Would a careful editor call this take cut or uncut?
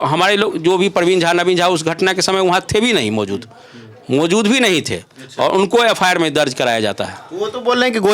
uncut